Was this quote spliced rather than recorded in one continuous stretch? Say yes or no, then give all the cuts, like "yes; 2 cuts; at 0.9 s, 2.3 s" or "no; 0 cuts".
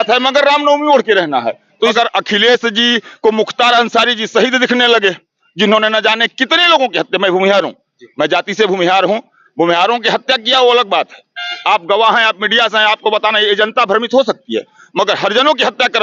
yes; 1 cut; at 1.9 s